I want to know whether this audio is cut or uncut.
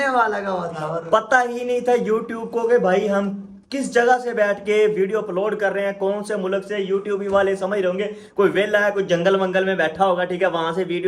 uncut